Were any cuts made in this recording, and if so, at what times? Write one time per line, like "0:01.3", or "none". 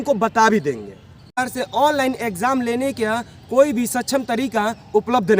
0:01.4